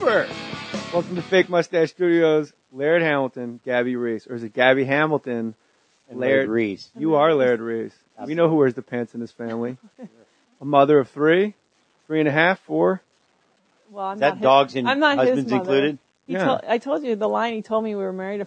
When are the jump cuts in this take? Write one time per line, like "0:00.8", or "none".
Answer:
0:04.9

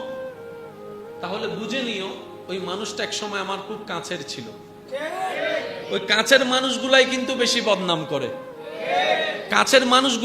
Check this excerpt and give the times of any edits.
none

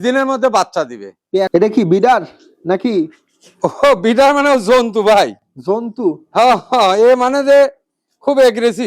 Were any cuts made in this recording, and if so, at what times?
0:01.5

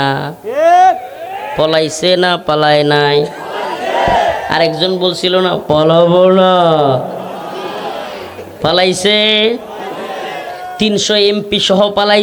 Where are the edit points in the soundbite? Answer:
none

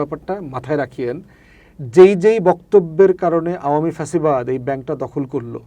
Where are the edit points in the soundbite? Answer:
none

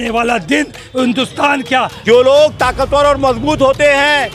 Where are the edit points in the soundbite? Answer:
0:02.0

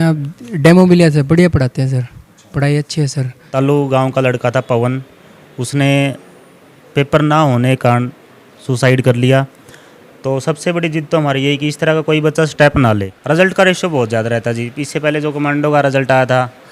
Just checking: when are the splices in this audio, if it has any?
0:03.4
0:13.1

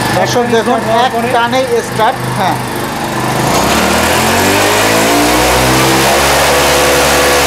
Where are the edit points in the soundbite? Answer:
none

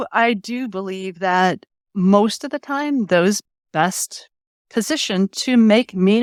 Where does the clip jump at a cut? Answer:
none

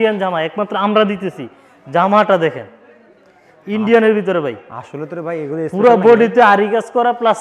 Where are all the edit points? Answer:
none

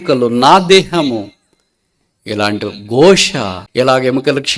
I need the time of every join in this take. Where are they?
0:03.6

